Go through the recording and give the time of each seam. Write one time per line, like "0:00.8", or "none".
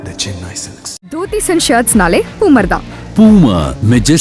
0:01.2